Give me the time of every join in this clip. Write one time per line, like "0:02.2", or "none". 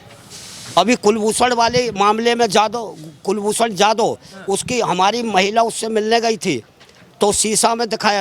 none